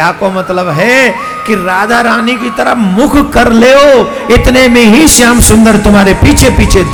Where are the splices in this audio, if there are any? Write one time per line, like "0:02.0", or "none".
none